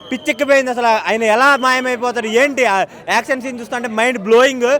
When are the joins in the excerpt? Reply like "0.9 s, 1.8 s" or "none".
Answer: none